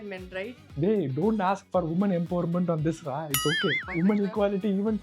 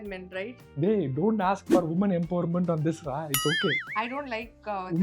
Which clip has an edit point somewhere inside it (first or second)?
first